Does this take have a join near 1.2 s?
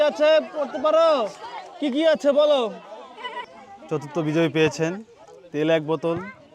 no; 1 cut; at 3.4 s

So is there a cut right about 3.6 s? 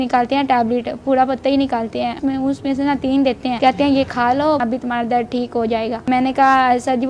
yes; 4 cuts; at 2.2 s, 3.6 s, 4.6 s, 6.1 s

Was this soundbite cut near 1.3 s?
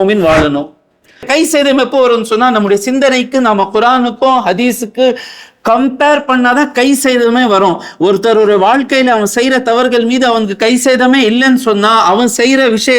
yes; 1 cut; at 1.3 s

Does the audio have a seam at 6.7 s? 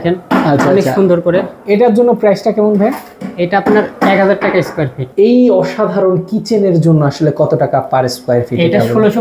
no; 1 cut; at 5.1 s

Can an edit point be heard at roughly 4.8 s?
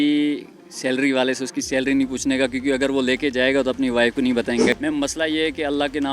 yes; 1 cut; at 4.8 s

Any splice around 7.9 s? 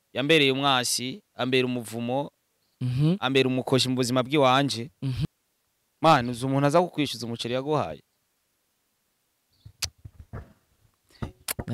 no; 1 cut; at 5.2 s

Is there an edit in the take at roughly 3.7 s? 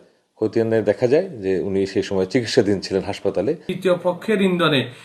yes; 1 cut; at 3.7 s

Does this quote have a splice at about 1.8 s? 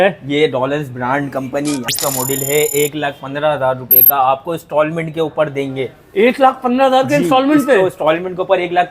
yes; 1 cut; at 1.8 s

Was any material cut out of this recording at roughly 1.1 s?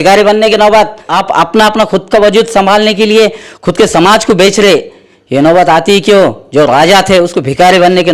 yes; 1 cut; at 1.1 s

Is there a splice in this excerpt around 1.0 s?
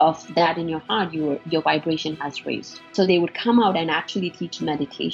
no; 1 cut; at 2.9 s

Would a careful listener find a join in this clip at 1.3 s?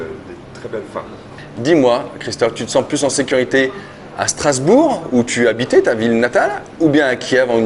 yes; 1 cut; at 1.3 s

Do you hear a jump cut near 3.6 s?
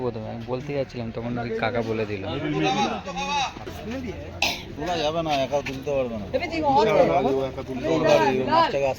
yes; 1 cut; at 3.6 s

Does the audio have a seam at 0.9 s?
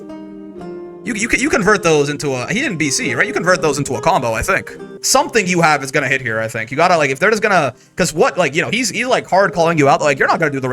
no; 1 cut; at 4.9 s

